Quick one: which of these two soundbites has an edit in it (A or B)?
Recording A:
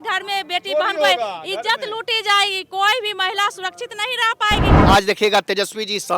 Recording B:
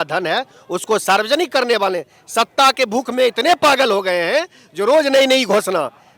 A